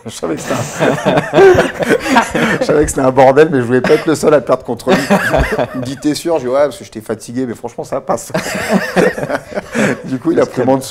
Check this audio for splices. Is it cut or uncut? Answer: uncut